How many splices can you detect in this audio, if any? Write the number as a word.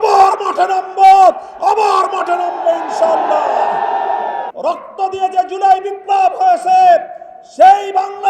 one